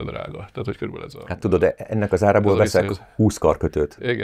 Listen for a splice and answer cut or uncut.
cut